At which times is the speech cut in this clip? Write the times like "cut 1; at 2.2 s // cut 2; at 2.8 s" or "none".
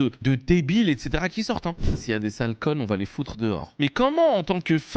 cut 1; at 1.8 s // cut 2; at 3.7 s